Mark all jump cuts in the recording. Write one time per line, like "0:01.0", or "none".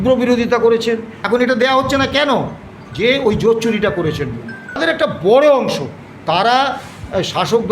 0:01.1
0:04.8